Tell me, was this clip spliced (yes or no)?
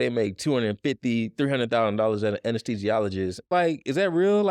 yes